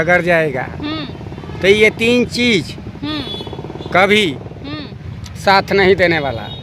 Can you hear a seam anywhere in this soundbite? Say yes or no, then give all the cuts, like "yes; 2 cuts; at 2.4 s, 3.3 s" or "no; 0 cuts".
no; 0 cuts